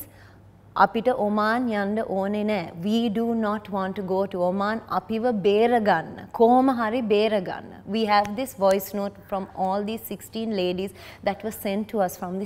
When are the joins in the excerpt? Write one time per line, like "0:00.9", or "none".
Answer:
none